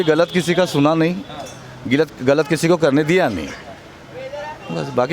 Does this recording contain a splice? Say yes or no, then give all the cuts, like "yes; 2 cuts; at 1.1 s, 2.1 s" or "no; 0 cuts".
no; 0 cuts